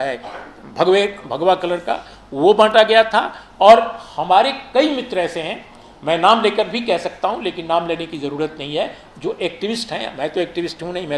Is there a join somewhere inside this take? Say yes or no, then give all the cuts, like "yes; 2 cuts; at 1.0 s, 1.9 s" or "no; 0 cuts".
no; 0 cuts